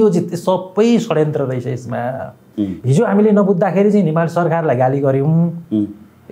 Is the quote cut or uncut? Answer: uncut